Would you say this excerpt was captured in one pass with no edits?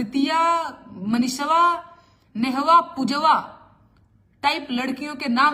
yes; 0 cuts

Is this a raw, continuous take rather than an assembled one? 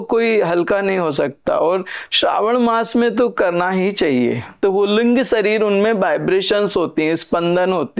no; 1 cut; at 4.5 s

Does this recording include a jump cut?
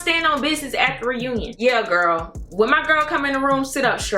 yes; 1 cut; at 1.5 s

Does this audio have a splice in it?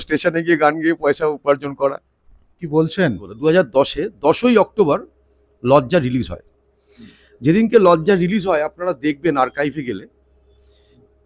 yes; 1 cut; at 3.3 s

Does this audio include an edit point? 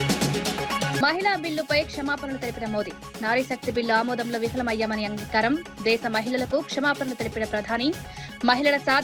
yes; 1 cut; at 1.0 s

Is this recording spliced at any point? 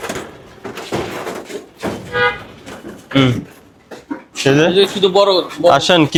no; 0 cuts

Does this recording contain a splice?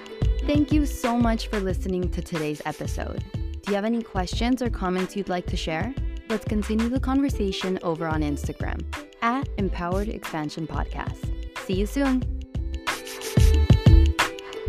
no; 0 cuts

